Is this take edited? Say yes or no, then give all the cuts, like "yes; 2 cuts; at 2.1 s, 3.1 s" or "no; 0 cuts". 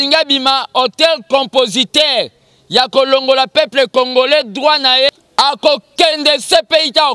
yes; 1 cut; at 5.1 s